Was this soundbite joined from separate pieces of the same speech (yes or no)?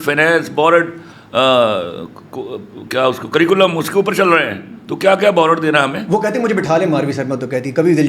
no